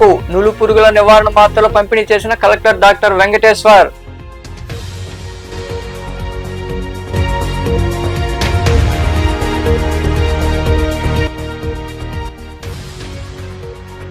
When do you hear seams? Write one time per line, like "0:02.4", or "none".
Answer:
none